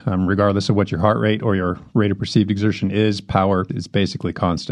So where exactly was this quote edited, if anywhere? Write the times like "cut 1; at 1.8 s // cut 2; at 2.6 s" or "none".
cut 1; at 3.8 s